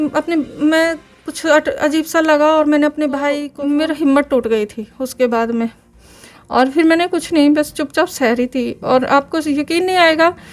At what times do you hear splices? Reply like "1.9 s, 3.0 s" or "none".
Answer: 3.5 s